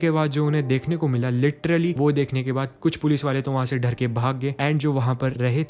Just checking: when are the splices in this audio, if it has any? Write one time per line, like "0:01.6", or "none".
none